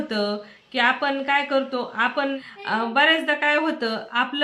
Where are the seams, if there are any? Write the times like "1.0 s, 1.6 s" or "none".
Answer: 2.4 s